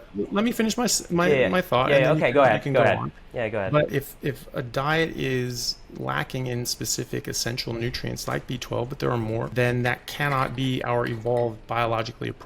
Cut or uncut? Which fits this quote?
cut